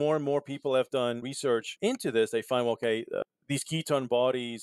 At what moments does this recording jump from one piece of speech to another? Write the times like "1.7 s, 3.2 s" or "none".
1.4 s